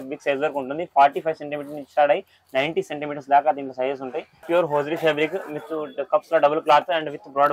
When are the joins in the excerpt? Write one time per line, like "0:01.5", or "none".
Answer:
0:04.4